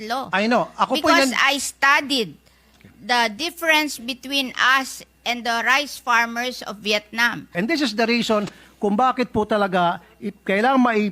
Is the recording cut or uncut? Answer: cut